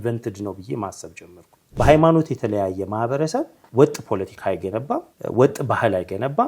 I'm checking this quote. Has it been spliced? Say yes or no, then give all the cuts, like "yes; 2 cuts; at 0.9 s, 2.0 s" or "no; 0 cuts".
yes; 3 cuts; at 1.8 s, 3.6 s, 5.1 s